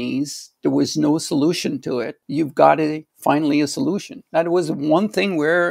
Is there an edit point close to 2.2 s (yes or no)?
yes